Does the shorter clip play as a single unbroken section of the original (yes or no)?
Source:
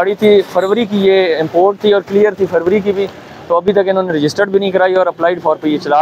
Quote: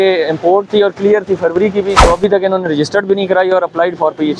no